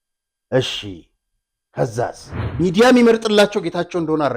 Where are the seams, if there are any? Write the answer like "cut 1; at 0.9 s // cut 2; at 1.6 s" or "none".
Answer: cut 1; at 2.4 s